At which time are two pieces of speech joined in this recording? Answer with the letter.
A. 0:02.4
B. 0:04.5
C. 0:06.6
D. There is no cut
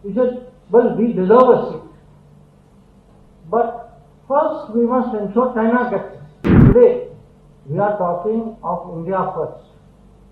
C